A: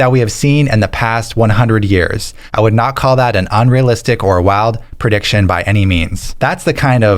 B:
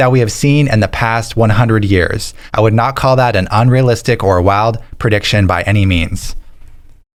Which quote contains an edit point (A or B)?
A